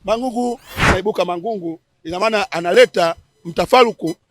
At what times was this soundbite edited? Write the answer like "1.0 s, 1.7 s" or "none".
0.9 s